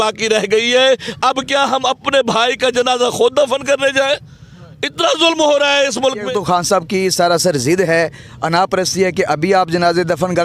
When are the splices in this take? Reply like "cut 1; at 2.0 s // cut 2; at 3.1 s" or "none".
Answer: cut 1; at 6.3 s